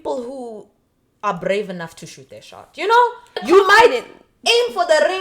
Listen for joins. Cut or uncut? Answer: cut